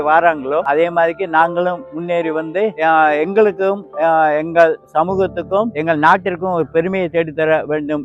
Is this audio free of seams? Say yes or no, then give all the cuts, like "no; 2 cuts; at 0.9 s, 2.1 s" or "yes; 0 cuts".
yes; 0 cuts